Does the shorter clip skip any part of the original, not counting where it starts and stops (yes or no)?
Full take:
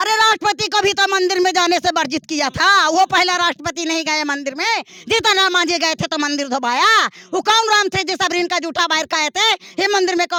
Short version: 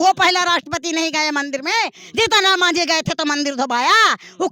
no